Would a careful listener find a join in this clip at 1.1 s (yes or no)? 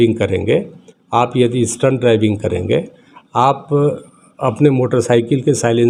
no